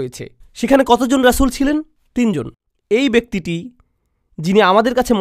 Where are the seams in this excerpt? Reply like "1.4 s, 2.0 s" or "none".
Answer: 2.6 s